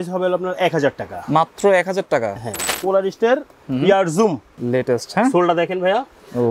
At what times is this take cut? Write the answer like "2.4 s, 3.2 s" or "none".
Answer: 2.8 s, 4.5 s